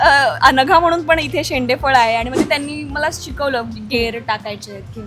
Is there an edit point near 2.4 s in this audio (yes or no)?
yes